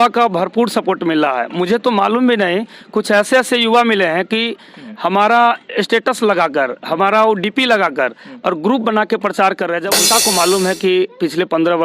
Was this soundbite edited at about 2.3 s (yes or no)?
no